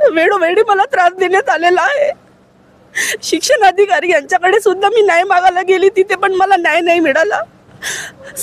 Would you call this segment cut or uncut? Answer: uncut